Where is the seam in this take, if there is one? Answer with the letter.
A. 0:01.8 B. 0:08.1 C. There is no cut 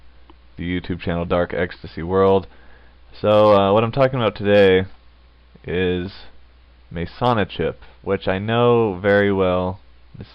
B